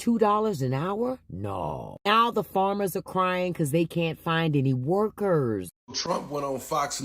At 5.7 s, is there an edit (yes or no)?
yes